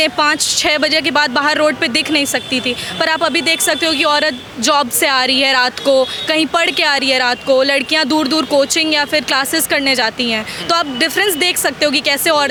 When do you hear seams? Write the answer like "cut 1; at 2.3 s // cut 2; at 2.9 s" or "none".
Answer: none